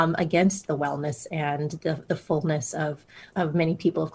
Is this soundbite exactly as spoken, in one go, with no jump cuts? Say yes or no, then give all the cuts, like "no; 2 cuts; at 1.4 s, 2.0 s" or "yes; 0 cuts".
no; 1 cut; at 3.2 s